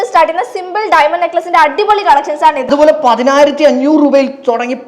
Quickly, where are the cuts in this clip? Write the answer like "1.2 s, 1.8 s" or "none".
2.6 s